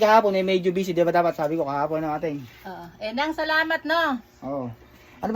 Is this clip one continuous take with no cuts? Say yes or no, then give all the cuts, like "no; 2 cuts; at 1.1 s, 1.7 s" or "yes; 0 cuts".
yes; 0 cuts